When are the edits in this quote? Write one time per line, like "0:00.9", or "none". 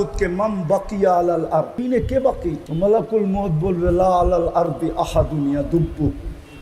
0:01.8
0:02.7

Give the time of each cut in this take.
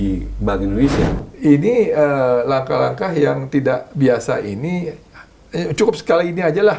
0:01.2

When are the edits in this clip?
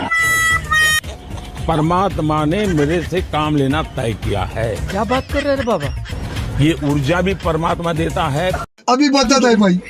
0:08.9

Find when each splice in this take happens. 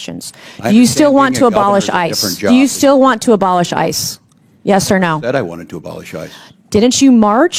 none

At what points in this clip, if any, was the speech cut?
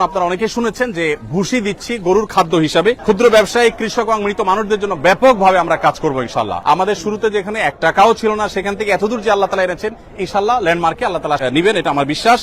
0:03.0
0:06.5
0:11.4

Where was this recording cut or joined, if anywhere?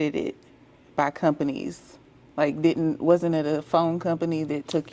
none

